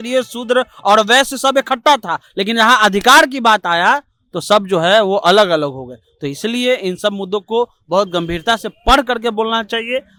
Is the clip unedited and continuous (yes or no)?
yes